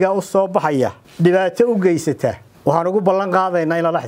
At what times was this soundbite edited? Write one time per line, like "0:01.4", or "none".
0:01.0
0:02.5